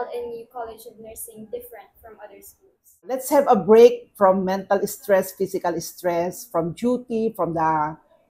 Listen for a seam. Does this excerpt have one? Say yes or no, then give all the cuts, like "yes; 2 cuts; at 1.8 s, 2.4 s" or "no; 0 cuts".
yes; 1 cut; at 3.2 s